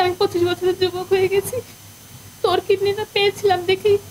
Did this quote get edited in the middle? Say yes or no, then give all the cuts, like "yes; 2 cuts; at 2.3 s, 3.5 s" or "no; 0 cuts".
no; 0 cuts